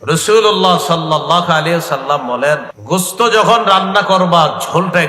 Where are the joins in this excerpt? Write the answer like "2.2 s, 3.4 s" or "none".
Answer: 2.7 s

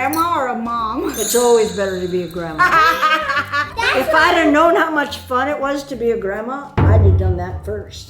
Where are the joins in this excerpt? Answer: 3.6 s

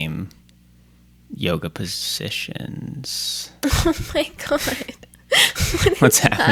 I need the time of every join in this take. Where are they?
none

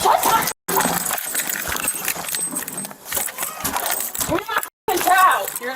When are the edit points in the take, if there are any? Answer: 3.0 s

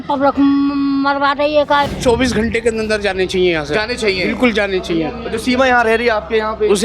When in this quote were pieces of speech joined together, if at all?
1.9 s

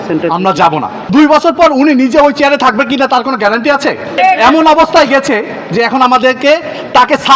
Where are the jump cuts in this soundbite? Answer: 1.1 s, 4.2 s

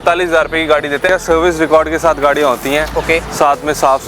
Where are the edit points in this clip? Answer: 1.1 s

